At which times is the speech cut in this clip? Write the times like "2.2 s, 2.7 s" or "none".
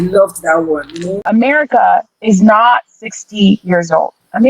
1.1 s